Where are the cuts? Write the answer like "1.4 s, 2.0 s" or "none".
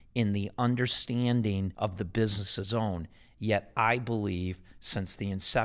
1.7 s